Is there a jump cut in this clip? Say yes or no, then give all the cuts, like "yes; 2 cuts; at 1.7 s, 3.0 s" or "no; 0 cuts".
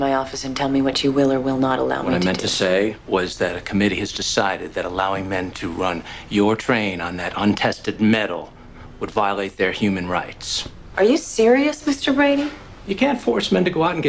yes; 1 cut; at 10.0 s